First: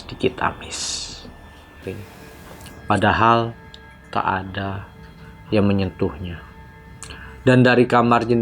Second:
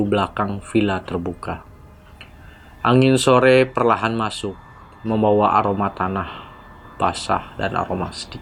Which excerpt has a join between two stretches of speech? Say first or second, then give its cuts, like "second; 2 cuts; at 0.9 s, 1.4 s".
first; 1 cut; at 1.9 s